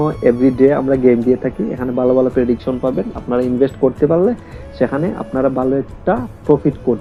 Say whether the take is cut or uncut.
uncut